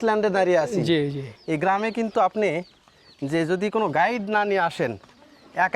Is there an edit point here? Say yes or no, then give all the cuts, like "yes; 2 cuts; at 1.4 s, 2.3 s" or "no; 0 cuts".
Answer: yes; 1 cut; at 1.2 s